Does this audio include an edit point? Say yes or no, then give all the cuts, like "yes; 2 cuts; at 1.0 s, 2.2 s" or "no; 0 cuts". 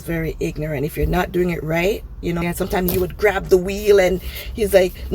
yes; 1 cut; at 2.4 s